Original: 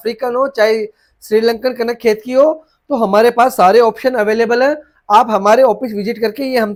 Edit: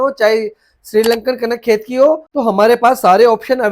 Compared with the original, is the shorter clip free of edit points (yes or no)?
no